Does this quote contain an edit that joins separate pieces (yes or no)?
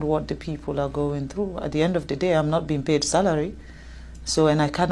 no